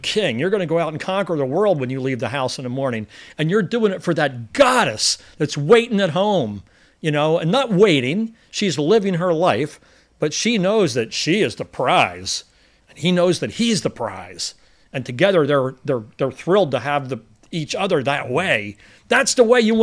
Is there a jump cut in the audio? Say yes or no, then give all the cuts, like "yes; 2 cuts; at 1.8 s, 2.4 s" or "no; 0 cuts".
no; 0 cuts